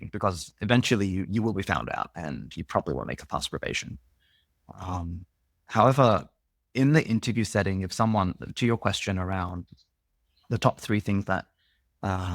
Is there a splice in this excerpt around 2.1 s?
no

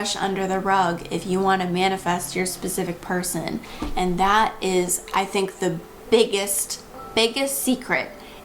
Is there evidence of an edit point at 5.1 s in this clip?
no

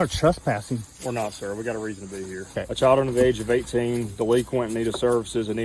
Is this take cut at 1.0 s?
no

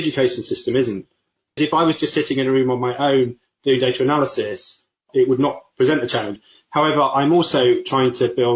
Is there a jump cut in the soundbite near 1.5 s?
yes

